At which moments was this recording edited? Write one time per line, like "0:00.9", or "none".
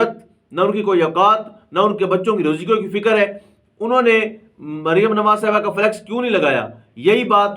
none